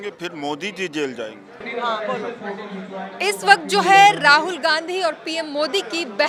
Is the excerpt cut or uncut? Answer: uncut